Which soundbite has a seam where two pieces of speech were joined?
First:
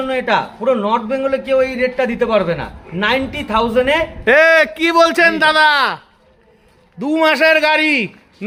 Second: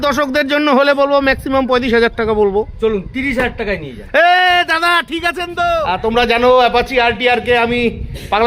second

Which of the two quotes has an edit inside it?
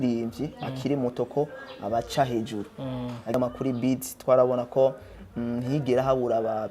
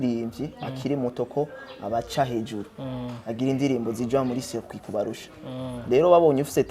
first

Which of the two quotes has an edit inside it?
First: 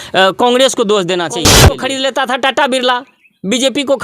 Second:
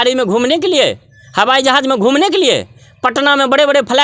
first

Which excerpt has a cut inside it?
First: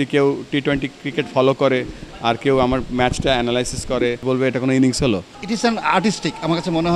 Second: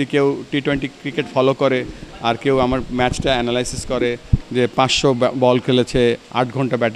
first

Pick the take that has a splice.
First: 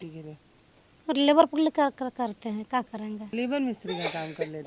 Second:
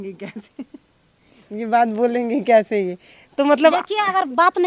first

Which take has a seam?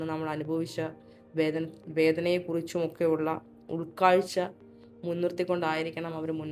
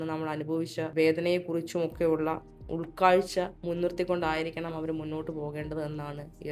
second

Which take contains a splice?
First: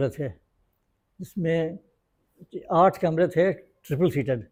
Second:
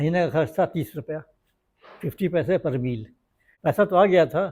second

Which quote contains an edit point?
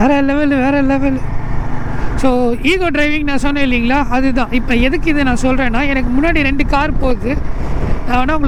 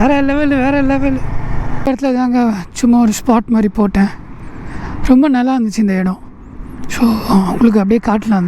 second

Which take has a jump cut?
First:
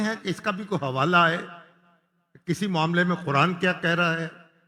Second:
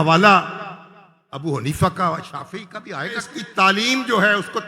second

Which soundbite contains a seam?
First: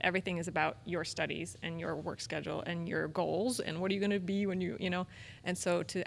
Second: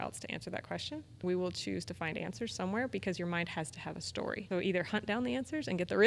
second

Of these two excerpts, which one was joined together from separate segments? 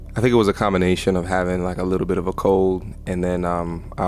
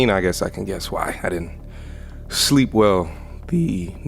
second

